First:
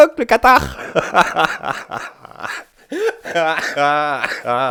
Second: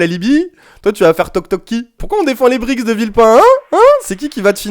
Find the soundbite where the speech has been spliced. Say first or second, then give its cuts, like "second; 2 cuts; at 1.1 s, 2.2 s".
second; 1 cut; at 2.0 s